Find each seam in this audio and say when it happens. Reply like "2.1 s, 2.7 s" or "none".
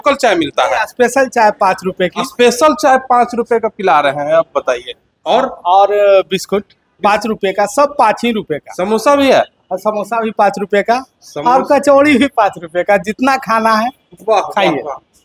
none